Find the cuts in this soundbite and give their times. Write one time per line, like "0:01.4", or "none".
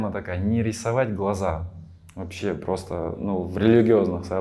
none